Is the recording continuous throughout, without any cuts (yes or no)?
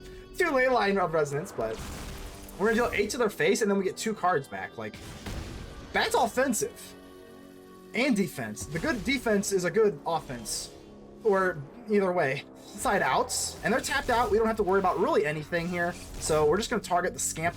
no